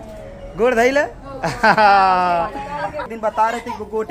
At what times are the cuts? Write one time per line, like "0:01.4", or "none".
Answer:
0:03.1

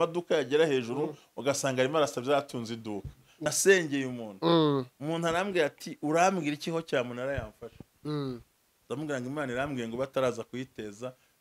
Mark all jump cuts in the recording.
0:03.5

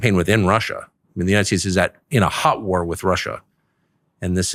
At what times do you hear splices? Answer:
none

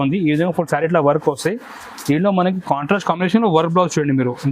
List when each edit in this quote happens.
none

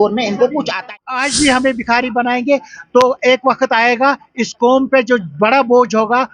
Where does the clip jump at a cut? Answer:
0:00.9

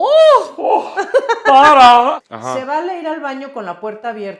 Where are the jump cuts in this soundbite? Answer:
0:02.2

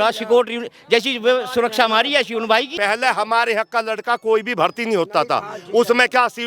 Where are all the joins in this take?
0:02.7

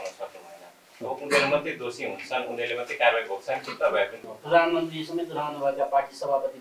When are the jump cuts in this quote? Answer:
0:04.3

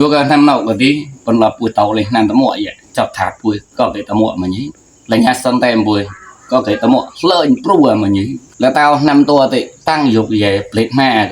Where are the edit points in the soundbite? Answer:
0:08.4

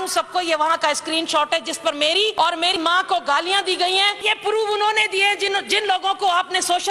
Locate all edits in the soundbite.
0:02.3
0:04.2

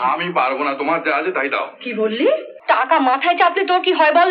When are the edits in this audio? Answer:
0:02.5

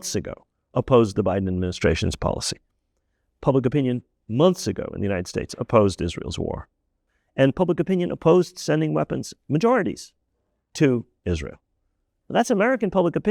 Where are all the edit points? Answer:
0:06.9

